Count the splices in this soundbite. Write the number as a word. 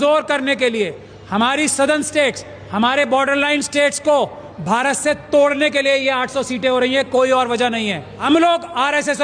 one